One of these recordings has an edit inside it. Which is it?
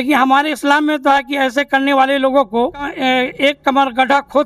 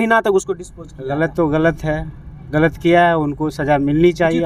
first; 1 cut; at 2.9 s

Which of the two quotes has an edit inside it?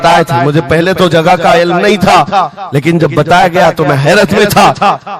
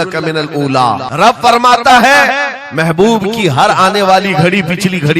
second; 1 cut; at 1.1 s

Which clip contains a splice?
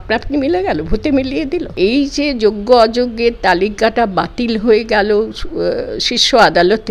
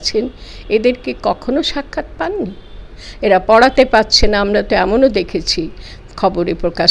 first; 1 cut; at 1.7 s

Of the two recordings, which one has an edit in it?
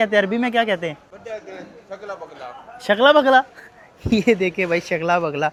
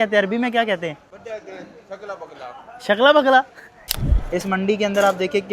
second; 1 cut; at 3.9 s

